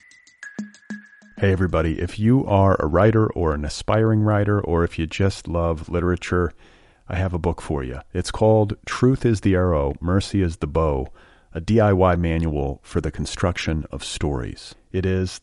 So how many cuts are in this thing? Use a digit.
1